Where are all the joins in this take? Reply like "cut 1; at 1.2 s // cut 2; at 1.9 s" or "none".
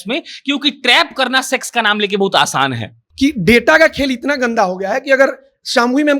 cut 1; at 3.0 s

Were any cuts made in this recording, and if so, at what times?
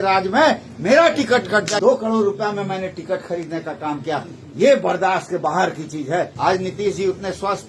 cut 1; at 1.8 s // cut 2; at 6.3 s

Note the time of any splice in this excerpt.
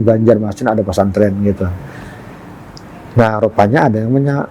none

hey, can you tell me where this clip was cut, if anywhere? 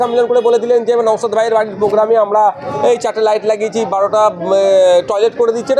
none

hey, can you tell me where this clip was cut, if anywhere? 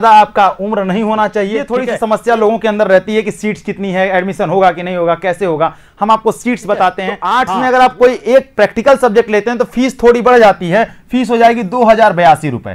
cut 1; at 1.6 s // cut 2; at 7.1 s

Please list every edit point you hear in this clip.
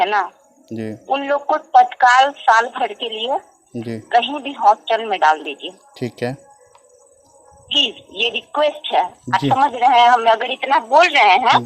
none

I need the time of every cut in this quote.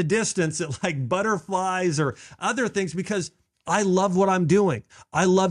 none

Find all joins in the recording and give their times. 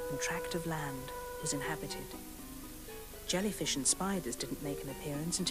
none

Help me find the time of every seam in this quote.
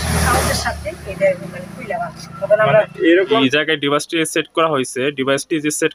cut 1; at 3.4 s

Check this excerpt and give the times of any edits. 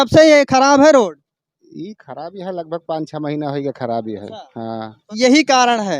cut 1; at 5.1 s

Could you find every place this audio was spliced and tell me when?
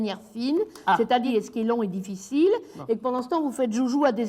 cut 1; at 1.3 s

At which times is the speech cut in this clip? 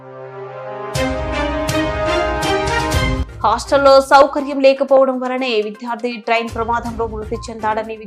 cut 1; at 3.2 s

